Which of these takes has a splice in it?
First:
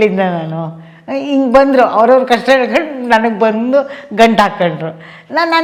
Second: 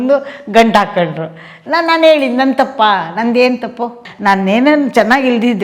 second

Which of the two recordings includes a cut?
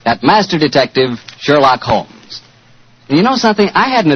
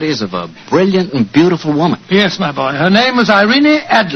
first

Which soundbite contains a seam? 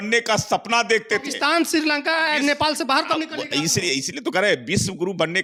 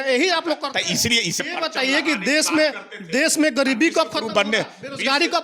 second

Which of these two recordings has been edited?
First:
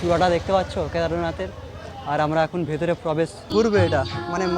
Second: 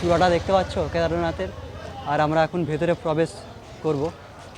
first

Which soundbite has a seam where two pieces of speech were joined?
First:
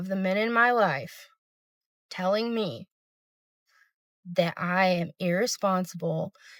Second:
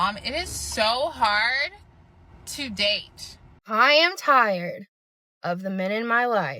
second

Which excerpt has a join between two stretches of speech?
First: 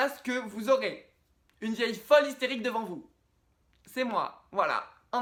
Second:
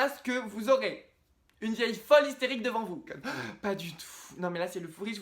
second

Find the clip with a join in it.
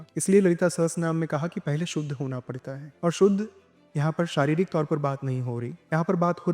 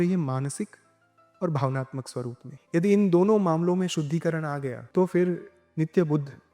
second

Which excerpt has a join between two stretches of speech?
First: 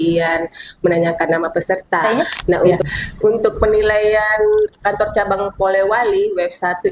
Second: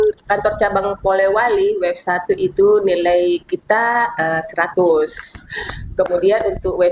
first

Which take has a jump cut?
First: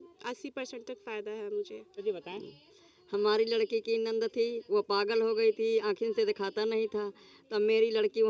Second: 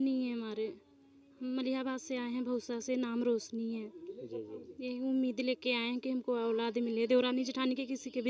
first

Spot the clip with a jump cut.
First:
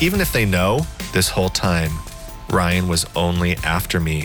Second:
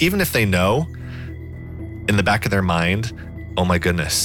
first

